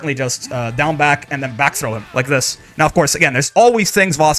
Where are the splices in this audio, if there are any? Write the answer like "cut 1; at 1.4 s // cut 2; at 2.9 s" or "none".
none